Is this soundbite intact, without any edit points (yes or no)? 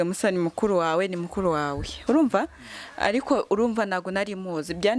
yes